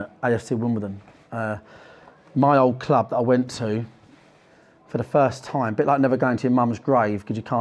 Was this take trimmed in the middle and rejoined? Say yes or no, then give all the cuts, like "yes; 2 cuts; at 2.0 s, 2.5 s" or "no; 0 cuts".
no; 0 cuts